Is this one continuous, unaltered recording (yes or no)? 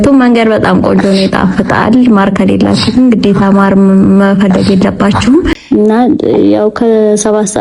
no